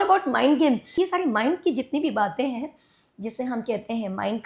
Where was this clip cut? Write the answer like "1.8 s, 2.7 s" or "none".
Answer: 1.0 s